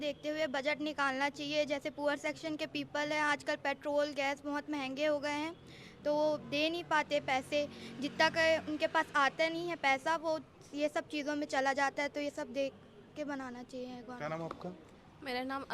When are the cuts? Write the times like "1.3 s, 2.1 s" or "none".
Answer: none

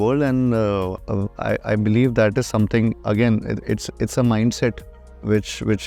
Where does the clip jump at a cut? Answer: 1.0 s

